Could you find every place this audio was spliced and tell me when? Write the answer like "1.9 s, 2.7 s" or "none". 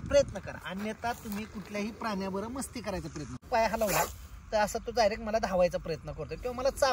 3.4 s